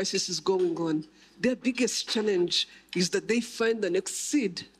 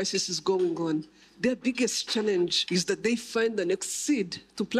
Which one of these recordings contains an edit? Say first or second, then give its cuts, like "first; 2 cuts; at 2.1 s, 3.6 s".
second; 1 cut; at 2.6 s